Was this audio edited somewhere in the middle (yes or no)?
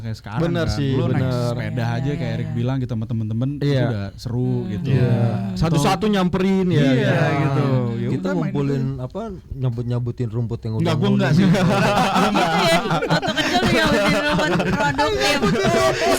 no